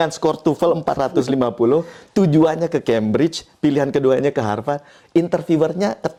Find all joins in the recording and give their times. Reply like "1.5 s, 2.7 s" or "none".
none